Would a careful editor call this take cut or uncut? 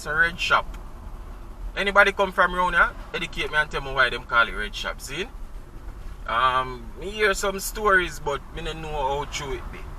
uncut